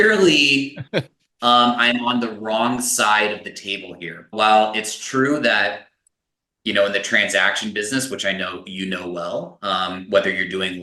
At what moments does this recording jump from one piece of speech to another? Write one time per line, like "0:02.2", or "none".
none

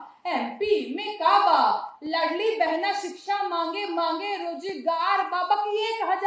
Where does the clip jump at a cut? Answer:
none

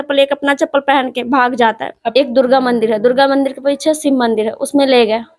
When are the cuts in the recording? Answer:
0:02.0

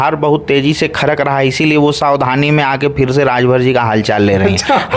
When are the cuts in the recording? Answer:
none

